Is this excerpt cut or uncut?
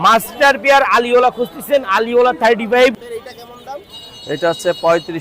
cut